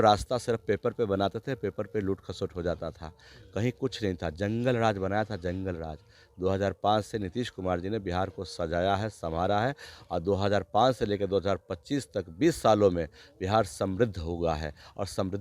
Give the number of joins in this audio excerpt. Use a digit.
0